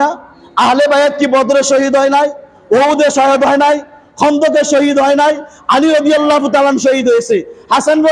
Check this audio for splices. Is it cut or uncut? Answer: uncut